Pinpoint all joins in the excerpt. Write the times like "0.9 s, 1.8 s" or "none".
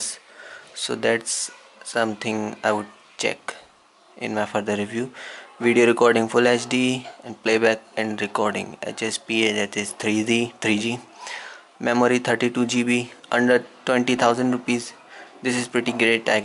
15.0 s